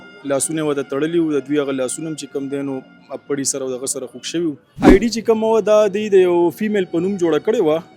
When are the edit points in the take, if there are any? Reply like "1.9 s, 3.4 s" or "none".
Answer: 4.8 s